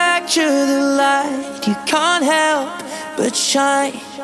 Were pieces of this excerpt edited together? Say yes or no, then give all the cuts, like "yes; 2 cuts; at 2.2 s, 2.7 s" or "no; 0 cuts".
no; 0 cuts